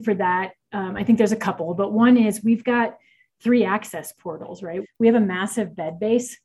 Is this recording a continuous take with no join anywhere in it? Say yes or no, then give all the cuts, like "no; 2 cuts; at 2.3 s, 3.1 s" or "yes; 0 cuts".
no; 1 cut; at 4.8 s